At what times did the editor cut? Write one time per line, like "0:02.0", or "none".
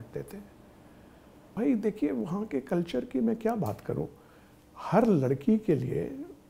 0:01.4